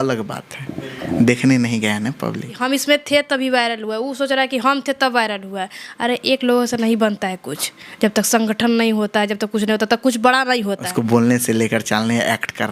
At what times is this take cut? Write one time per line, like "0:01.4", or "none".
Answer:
0:02.5
0:10.9